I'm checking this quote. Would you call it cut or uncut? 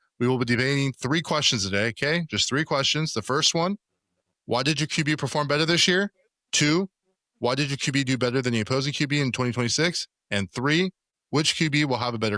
cut